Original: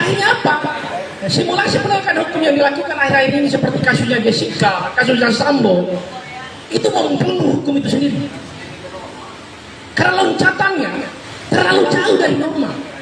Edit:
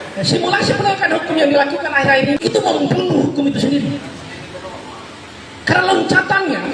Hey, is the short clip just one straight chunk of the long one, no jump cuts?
no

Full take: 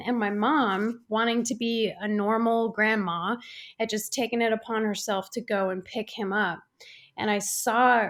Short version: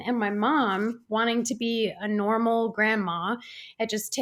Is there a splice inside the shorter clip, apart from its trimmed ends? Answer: no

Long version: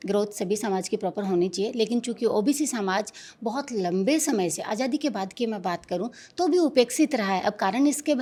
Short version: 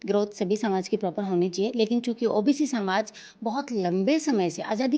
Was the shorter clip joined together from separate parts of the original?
no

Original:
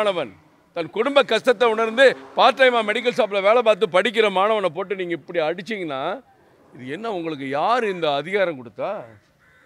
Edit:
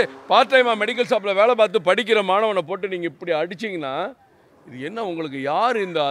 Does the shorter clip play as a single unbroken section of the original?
yes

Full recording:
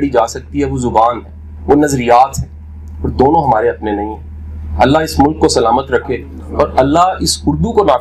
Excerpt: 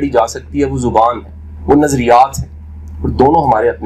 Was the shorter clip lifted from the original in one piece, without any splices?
yes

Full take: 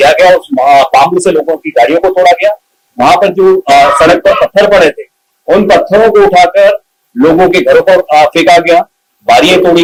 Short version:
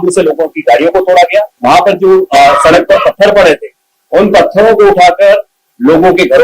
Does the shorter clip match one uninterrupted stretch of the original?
no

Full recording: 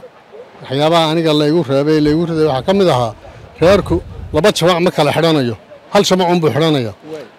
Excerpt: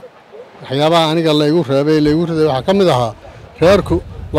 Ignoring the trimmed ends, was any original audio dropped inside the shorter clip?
no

